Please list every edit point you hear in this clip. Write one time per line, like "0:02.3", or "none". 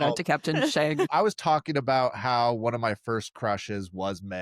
0:01.1